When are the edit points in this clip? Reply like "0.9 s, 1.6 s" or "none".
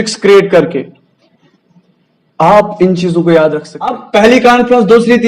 4.0 s